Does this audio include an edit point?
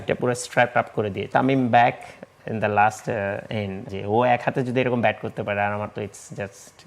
yes; 2 cuts; at 1.3 s, 3.8 s

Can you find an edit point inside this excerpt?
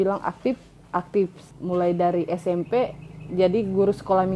no; 0 cuts

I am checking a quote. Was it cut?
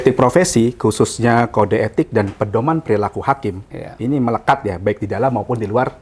no; 0 cuts

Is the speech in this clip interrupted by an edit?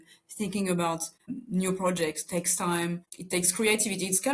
yes; 2 cuts; at 1.3 s, 3.1 s

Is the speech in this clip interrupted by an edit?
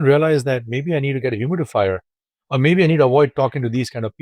no; 0 cuts

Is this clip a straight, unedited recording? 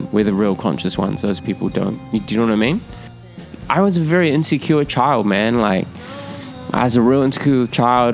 no; 1 cut; at 3.4 s

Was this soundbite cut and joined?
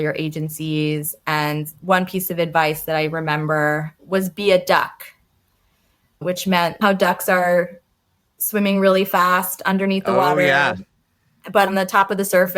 yes; 3 cuts; at 3.9 s, 6.8 s, 11.7 s

